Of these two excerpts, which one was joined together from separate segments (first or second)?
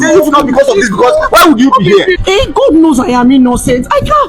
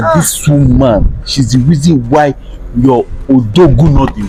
first